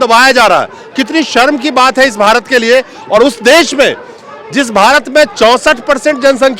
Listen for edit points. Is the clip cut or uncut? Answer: uncut